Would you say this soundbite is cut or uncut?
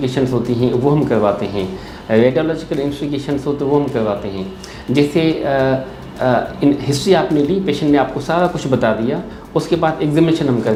uncut